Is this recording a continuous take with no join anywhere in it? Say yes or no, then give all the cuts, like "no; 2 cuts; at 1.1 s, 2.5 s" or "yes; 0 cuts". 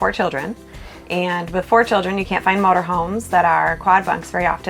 yes; 0 cuts